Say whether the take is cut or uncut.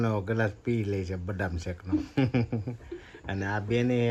uncut